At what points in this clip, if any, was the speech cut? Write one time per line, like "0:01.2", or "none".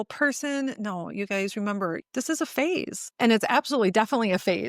0:02.0